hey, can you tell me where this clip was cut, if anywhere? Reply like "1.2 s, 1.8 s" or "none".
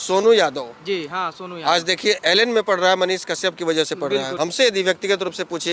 4.3 s